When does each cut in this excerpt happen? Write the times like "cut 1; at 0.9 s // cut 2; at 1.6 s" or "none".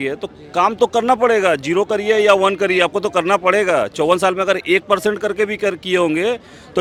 none